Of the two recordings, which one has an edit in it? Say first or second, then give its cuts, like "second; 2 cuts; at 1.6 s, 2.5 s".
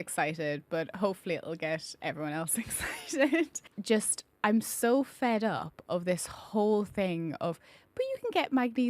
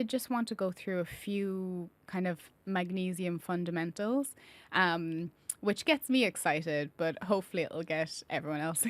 first; 1 cut; at 3.7 s